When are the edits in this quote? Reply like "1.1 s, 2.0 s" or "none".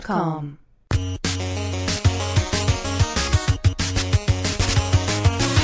4.0 s

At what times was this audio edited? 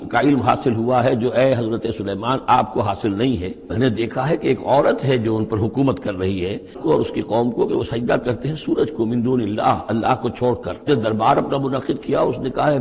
3.7 s, 6.8 s, 10.8 s

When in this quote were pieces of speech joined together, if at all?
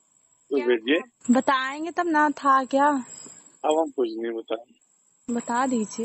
none

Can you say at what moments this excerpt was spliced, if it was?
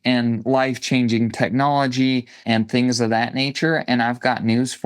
2.4 s

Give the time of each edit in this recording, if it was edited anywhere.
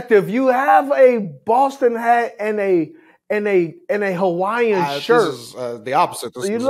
none

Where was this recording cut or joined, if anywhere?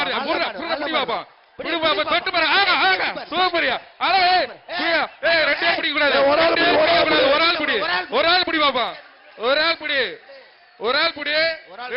none

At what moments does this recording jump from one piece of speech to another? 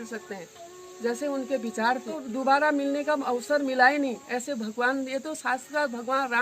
2.2 s

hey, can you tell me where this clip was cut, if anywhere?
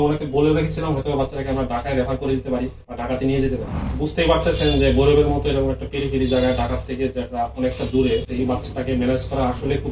3.8 s, 8.3 s

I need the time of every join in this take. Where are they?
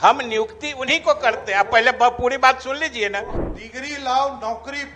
3.4 s

